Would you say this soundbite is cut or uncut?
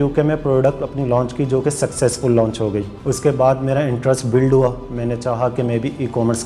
cut